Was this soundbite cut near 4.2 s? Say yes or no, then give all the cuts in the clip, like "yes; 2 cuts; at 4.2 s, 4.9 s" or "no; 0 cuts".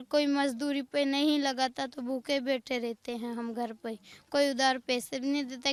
no; 0 cuts